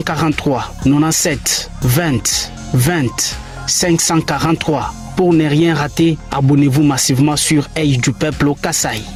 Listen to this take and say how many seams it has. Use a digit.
0